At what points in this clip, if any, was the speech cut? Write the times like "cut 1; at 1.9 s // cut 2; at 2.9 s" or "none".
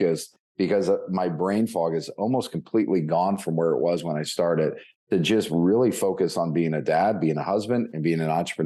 none